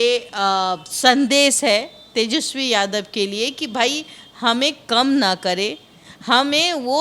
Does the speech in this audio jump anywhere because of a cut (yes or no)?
no